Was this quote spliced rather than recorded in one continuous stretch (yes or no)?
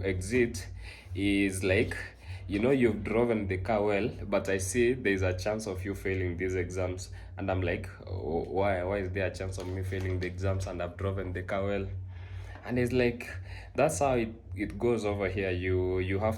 no